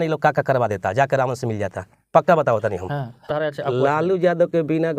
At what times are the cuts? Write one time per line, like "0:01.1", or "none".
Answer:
0:03.3